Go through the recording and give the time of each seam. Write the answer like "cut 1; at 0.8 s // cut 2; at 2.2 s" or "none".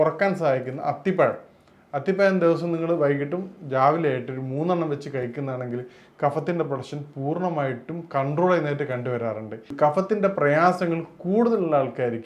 cut 1; at 9.6 s